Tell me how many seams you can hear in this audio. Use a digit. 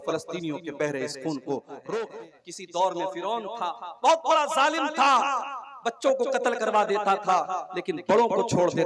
1